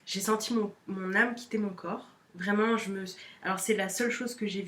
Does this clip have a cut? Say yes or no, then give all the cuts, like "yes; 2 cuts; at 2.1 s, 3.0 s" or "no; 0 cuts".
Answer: no; 0 cuts